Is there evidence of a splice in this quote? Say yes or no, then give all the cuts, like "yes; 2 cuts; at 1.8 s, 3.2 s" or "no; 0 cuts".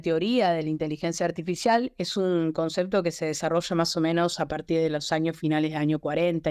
no; 0 cuts